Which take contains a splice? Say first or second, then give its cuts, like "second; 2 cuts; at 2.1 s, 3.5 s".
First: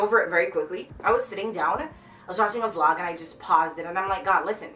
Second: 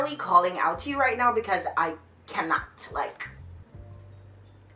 first; 1 cut; at 0.9 s